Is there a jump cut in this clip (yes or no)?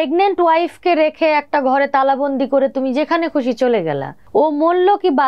yes